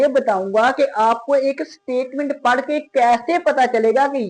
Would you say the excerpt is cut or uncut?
uncut